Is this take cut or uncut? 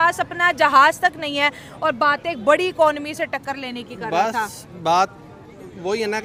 uncut